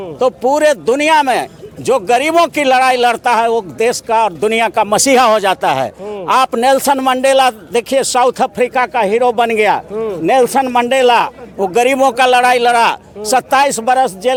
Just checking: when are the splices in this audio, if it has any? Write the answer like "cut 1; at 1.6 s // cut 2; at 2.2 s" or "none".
none